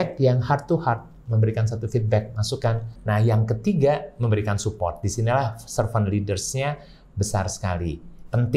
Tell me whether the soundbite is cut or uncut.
cut